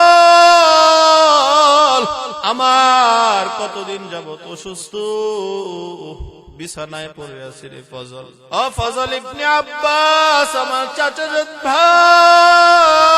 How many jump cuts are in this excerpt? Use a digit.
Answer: 2